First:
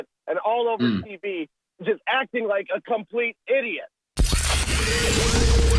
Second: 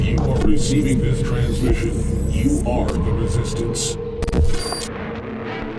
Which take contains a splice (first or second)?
first